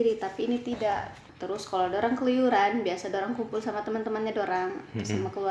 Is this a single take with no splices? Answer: no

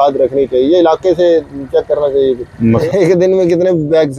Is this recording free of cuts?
no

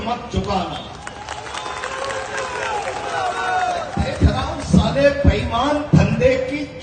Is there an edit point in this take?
no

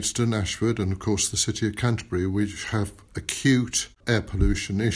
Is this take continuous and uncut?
no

